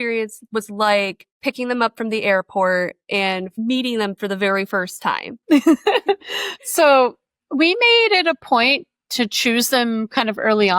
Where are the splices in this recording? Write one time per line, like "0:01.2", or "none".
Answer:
0:01.2
0:05.3